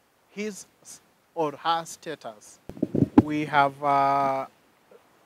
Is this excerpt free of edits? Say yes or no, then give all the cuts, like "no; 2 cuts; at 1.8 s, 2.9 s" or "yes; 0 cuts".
no; 1 cut; at 2.7 s